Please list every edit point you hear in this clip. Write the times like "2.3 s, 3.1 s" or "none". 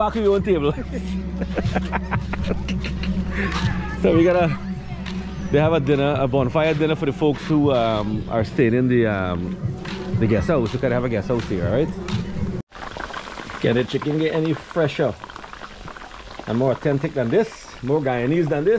12.6 s